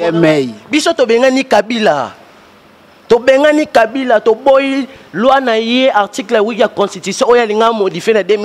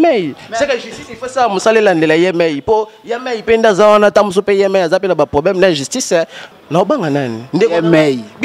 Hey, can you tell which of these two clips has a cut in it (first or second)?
second